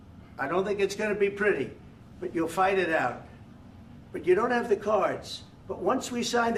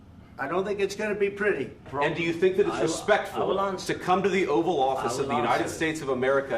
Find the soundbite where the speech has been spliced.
second; 1 cut; at 1.9 s

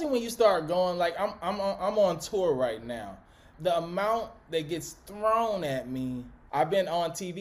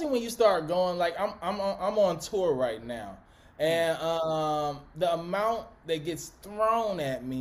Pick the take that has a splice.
first; 2 cuts; at 3.5 s, 6.4 s

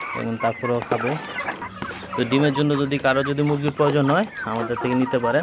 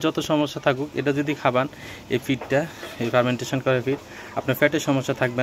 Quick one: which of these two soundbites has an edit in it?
first; 1 cut; at 1.7 s

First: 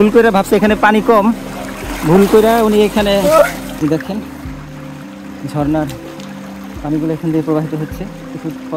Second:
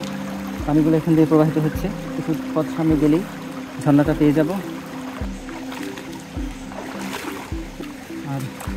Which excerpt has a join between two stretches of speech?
first; 1 cut; at 3.7 s

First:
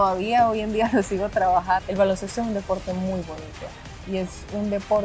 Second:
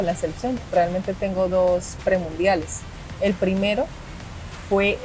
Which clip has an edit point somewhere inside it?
first; 1 cut; at 1.9 s

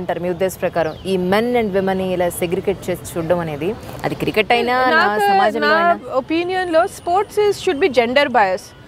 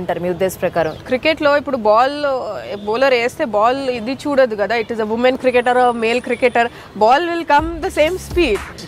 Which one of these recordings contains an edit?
second; 1 cut; at 1.0 s

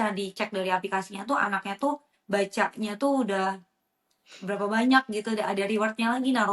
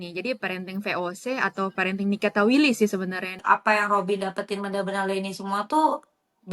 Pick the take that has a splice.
second; 1 cut; at 3.4 s

